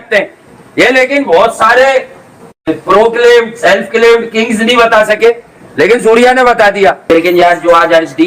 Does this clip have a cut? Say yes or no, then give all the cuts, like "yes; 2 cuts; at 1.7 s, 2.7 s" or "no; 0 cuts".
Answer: no; 0 cuts